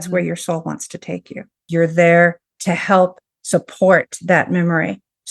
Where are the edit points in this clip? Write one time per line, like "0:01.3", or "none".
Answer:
0:01.7
0:02.5